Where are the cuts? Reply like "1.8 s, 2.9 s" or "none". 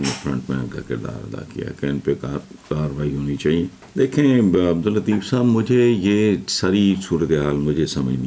3.8 s